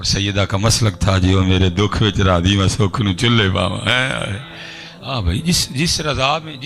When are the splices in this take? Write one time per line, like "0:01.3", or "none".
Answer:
none